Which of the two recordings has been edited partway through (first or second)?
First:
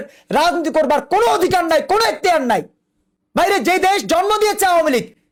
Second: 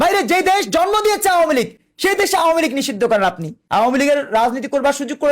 second